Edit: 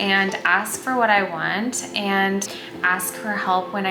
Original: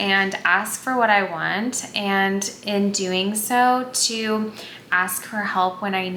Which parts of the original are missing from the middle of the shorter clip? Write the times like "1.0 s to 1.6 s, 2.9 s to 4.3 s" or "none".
2.5 s to 4.6 s